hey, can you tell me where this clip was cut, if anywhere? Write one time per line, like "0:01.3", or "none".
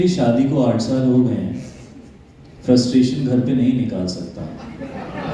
none

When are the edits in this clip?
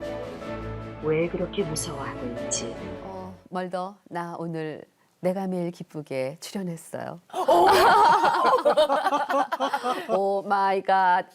0:03.1

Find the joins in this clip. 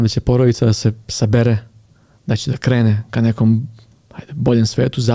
none

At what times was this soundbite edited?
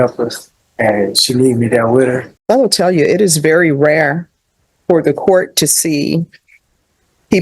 0:02.3

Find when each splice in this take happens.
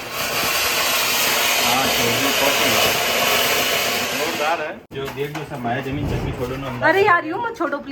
0:04.8

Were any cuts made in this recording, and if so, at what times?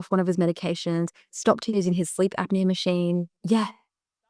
0:03.4

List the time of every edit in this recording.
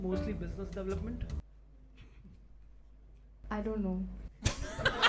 0:01.4

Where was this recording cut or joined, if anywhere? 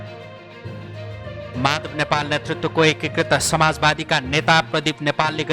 0:01.5

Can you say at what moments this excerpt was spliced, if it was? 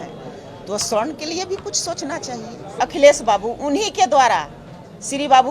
0:02.7

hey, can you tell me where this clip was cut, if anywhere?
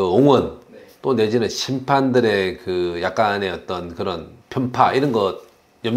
0:04.3

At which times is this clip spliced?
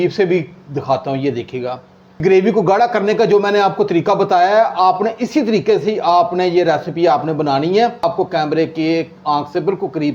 0:02.2
0:08.0

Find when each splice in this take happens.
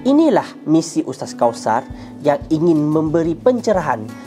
none

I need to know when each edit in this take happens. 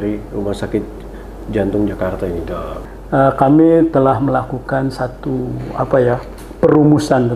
0:02.7

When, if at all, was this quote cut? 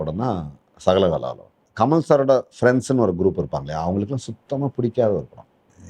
0:01.6

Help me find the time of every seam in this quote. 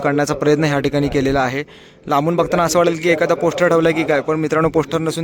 none

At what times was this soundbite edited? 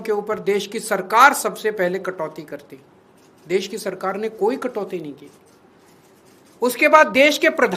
none

